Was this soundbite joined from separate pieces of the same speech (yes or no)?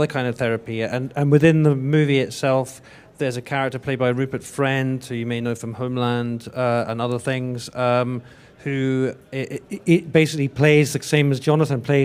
yes